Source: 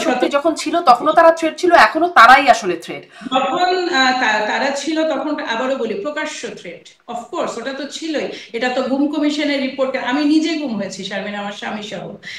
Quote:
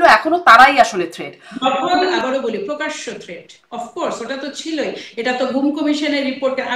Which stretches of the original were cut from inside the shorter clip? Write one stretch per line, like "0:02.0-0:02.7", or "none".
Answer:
0:03.9-0:05.5